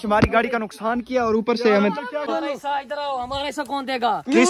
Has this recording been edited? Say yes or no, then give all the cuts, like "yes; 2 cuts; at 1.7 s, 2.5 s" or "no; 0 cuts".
yes; 1 cut; at 2.3 s